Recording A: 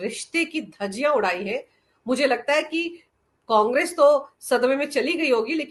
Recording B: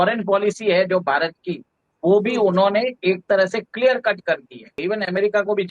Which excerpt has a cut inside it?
B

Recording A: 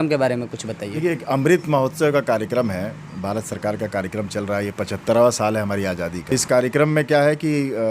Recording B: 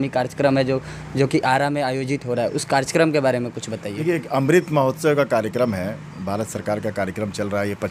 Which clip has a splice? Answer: A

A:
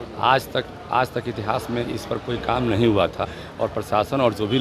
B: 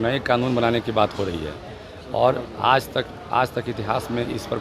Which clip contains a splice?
A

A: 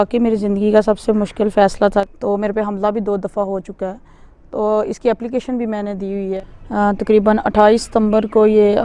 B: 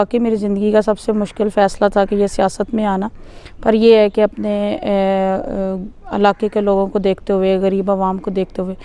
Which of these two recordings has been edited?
A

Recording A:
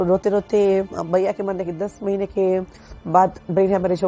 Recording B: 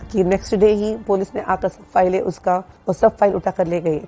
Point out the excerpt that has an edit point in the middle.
B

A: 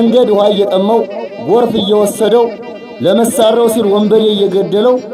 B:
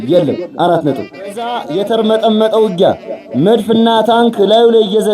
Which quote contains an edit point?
B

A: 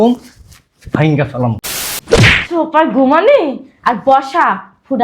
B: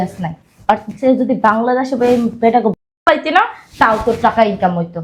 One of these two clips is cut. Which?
A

